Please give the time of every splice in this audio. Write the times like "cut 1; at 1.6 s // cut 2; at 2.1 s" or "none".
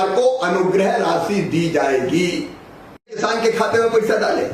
cut 1; at 3.2 s